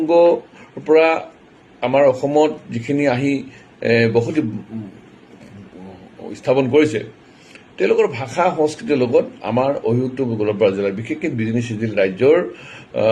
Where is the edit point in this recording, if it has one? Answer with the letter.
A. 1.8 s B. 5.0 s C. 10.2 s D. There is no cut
D